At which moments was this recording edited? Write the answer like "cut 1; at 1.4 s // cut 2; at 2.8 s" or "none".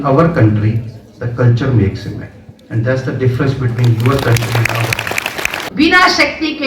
cut 1; at 5.6 s

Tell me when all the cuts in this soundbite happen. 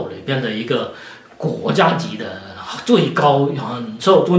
none

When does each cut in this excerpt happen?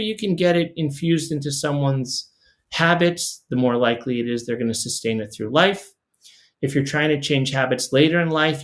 none

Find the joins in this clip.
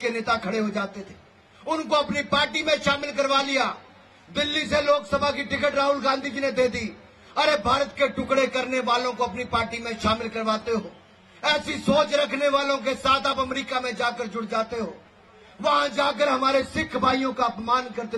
none

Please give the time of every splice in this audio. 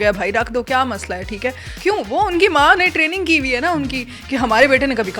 cut 1; at 1.7 s

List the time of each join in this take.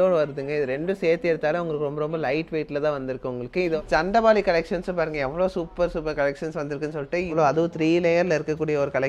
cut 1; at 3.8 s // cut 2; at 7.3 s

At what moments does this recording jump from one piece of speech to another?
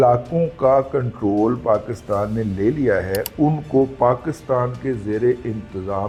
none

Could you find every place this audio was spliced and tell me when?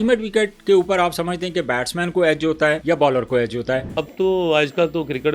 cut 1; at 2.8 s // cut 2; at 3.9 s

